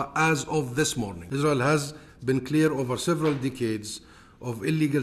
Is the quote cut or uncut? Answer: cut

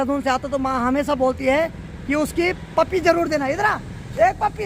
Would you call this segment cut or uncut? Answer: uncut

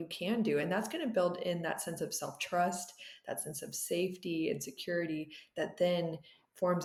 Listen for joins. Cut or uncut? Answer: uncut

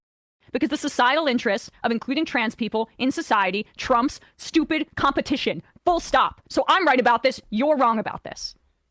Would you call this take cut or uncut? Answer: uncut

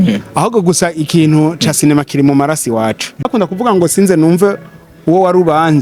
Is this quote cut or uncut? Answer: cut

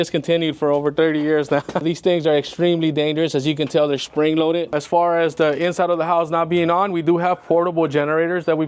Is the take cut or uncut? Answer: cut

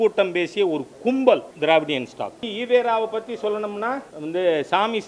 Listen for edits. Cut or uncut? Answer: cut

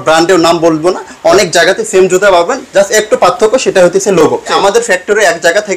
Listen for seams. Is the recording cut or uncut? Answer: cut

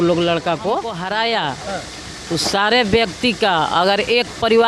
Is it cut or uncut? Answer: cut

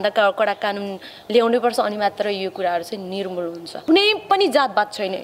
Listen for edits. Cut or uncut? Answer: cut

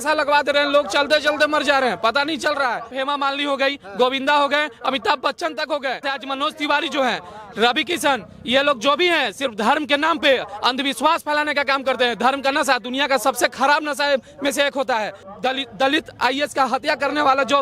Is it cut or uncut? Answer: cut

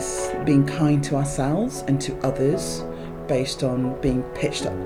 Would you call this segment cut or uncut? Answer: uncut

